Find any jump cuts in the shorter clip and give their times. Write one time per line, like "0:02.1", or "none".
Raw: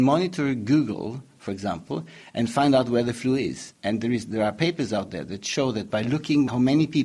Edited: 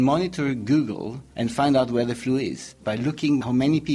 0:01.2
0:02.8